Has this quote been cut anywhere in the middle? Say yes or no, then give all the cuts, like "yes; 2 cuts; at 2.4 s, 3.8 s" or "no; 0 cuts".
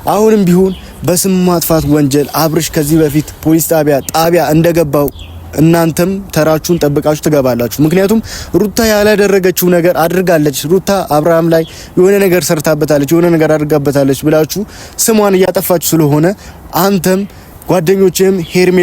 no; 0 cuts